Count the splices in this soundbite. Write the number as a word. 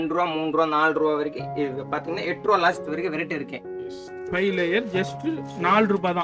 one